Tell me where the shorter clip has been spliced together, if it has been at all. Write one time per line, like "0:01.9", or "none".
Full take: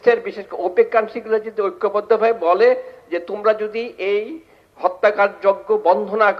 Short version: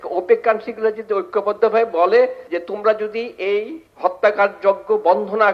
0:02.4
0:03.8